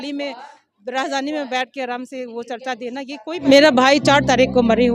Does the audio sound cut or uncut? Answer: cut